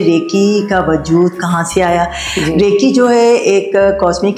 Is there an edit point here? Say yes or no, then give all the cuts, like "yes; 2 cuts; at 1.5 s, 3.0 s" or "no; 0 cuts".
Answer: no; 0 cuts